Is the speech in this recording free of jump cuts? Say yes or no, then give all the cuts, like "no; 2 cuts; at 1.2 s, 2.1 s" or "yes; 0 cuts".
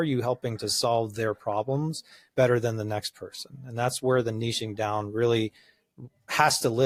yes; 0 cuts